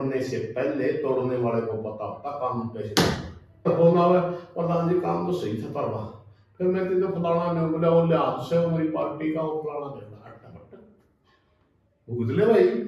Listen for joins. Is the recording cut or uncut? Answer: cut